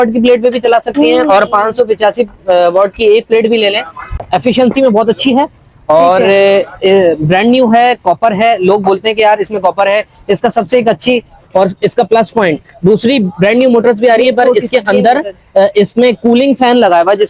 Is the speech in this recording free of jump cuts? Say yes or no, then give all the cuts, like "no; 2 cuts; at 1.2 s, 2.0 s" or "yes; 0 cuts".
no; 1 cut; at 4.2 s